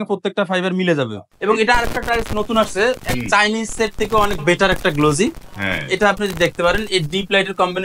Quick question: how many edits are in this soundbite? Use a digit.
1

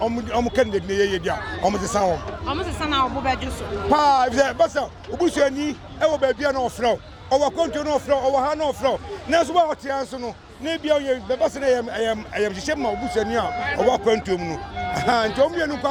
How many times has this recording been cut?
0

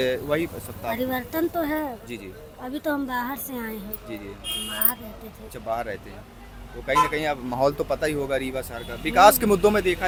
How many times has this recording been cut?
0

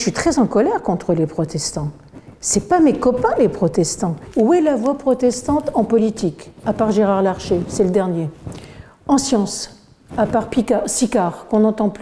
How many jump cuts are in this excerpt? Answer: 1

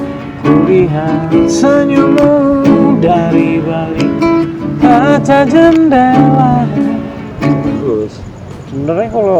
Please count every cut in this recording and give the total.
1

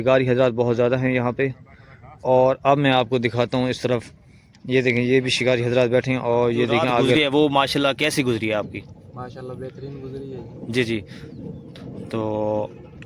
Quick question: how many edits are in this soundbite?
1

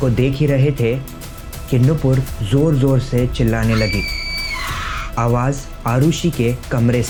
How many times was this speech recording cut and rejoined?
0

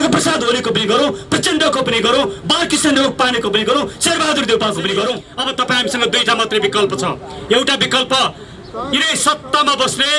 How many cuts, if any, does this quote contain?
1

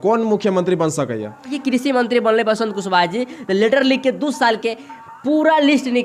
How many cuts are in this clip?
1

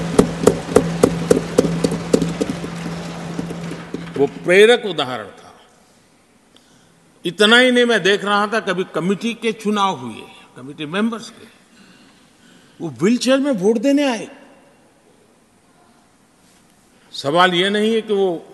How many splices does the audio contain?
0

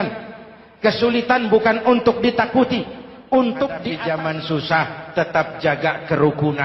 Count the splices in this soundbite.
1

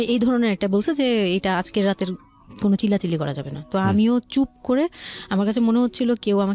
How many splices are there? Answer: 0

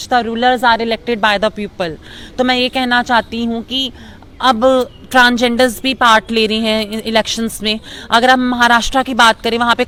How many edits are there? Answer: 0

